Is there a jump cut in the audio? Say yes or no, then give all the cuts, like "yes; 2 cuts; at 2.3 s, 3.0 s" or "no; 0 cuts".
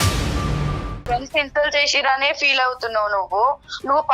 yes; 1 cut; at 0.9 s